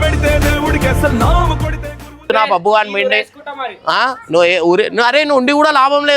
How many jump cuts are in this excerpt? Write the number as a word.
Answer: one